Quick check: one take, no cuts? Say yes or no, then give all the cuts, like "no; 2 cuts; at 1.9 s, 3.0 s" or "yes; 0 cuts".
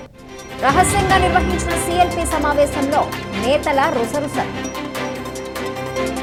yes; 0 cuts